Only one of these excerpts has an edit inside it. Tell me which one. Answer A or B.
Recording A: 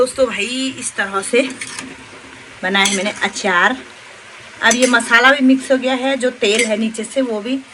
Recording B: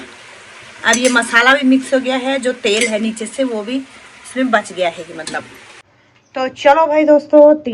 B